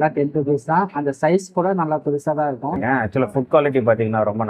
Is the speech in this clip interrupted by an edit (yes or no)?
yes